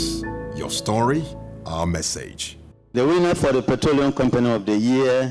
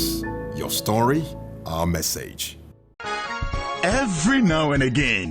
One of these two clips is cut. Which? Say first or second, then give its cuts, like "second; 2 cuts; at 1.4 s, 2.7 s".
second; 1 cut; at 2.4 s